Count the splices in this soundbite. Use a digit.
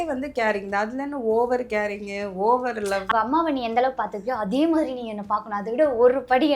1